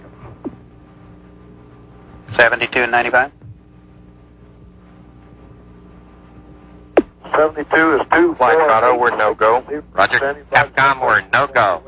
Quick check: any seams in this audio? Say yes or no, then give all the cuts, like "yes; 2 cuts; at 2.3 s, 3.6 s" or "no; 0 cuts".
no; 0 cuts